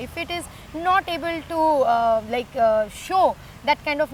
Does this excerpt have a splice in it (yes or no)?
no